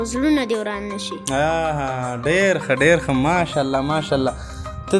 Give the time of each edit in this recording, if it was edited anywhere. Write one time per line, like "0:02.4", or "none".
none